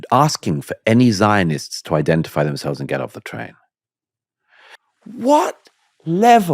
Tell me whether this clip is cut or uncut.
cut